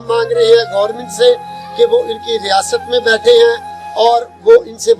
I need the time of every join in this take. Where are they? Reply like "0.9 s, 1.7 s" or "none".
none